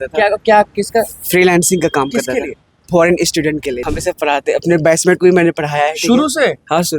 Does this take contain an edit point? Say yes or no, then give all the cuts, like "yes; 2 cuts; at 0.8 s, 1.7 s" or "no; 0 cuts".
yes; 1 cut; at 3.9 s